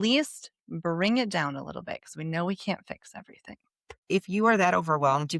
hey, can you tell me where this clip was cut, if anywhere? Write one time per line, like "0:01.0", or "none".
0:03.9